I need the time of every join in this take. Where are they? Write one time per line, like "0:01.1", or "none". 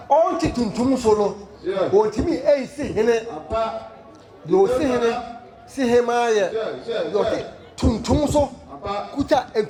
none